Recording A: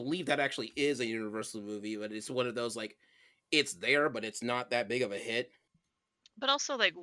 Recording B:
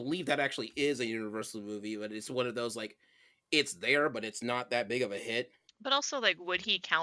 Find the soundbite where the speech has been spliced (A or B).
B